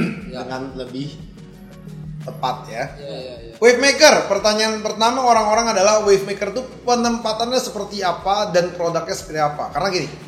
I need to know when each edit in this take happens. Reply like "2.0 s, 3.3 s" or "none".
3.4 s